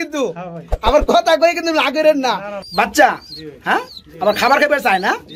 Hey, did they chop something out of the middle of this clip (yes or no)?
yes